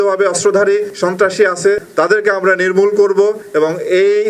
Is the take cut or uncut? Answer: cut